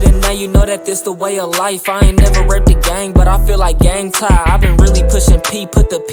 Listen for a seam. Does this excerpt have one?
no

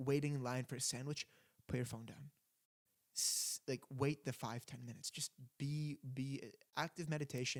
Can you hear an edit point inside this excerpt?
no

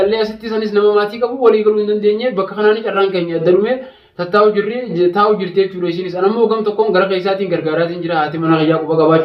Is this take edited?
no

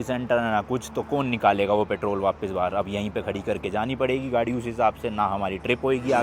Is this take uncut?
yes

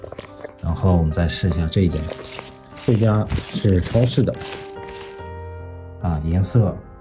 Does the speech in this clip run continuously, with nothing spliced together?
yes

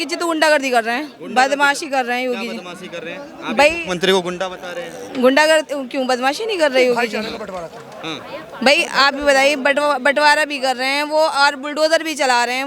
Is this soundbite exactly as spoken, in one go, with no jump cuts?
yes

